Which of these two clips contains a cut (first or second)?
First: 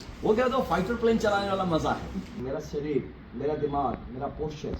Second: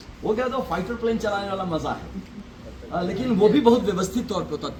first